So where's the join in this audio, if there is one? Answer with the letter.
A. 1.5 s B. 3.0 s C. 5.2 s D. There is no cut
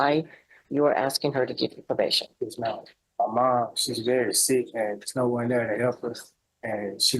B